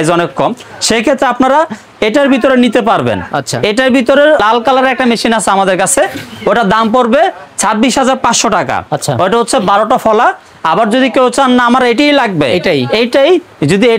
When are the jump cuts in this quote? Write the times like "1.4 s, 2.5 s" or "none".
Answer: none